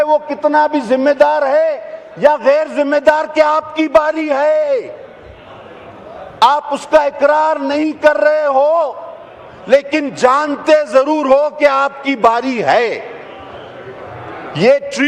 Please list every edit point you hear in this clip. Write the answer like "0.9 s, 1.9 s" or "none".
none